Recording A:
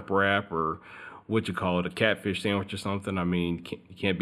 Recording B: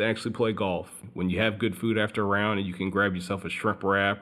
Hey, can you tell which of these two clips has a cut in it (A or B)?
B